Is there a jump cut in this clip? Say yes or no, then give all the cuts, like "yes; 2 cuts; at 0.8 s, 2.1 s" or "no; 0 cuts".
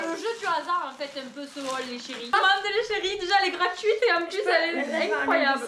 yes; 1 cut; at 2.3 s